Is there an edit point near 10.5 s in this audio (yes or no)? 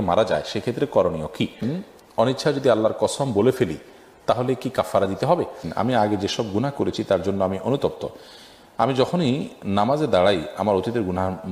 no